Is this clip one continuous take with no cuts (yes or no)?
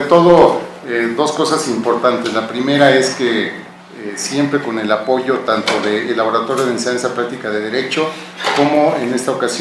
yes